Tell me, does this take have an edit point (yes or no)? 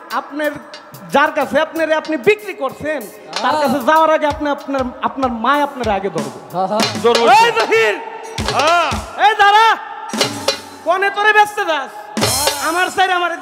no